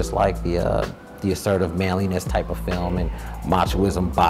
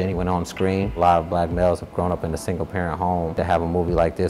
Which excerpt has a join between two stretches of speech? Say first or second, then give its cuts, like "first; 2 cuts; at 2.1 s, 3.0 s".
second; 2 cuts; at 0.9 s, 3.4 s